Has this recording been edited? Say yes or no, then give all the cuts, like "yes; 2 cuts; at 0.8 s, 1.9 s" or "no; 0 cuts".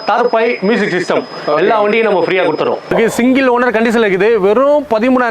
yes; 1 cut; at 2.9 s